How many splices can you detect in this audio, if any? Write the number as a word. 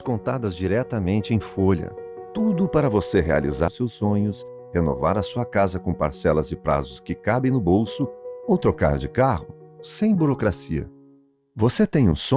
one